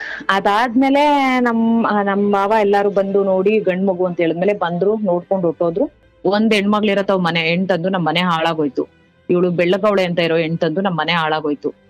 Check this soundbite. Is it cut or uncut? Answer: cut